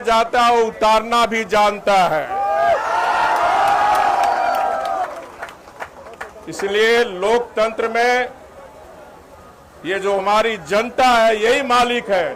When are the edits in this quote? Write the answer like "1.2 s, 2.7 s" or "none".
none